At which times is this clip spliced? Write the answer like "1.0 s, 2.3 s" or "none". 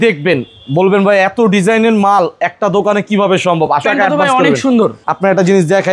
3.8 s, 5.0 s